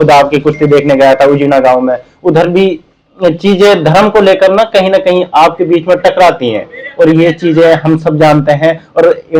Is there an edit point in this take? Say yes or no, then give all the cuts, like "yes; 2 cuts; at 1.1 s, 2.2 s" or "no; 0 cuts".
no; 0 cuts